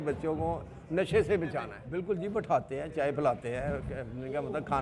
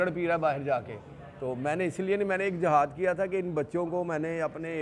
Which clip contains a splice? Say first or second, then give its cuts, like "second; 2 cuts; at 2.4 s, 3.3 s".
first; 1 cut; at 1.8 s